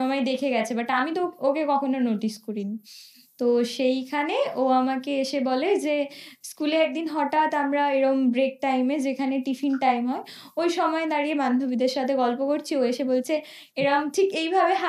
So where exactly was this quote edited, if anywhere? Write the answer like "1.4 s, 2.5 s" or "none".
none